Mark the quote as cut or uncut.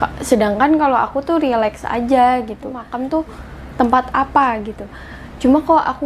cut